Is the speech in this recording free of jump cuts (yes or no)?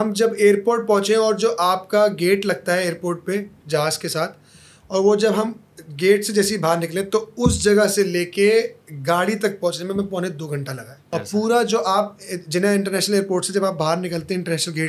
no